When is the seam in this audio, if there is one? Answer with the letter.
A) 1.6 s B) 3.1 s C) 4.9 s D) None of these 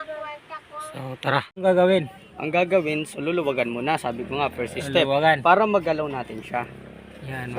A